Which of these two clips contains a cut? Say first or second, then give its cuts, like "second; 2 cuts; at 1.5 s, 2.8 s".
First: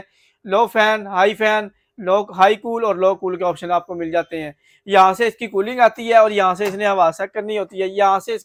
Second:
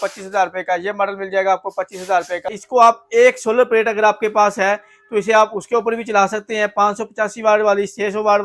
second; 1 cut; at 2.6 s